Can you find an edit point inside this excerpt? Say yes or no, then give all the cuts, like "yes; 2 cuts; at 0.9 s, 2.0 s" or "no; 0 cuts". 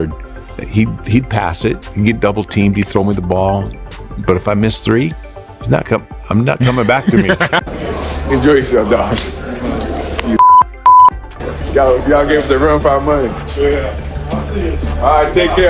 yes; 1 cut; at 7.5 s